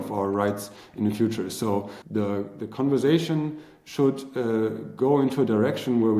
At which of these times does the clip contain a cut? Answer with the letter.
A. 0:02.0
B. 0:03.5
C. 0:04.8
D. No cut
A